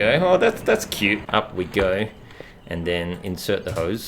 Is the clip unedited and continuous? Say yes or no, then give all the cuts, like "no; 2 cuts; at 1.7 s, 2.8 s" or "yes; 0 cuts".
no; 1 cut; at 1.2 s